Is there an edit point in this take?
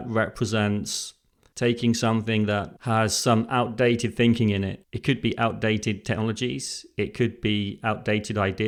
no; 0 cuts

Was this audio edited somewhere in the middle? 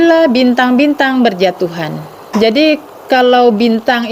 yes; 1 cut; at 2.2 s

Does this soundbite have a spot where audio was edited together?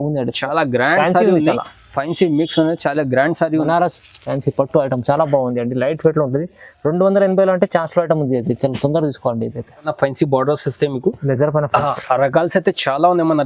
yes; 2 cuts; at 3.6 s, 9.9 s

